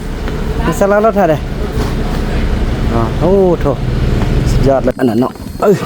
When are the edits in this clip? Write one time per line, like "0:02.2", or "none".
0:04.9